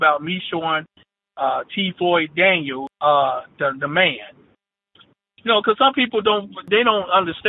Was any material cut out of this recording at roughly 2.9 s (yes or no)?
yes